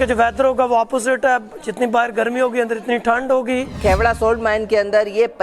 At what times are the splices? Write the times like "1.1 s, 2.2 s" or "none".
3.7 s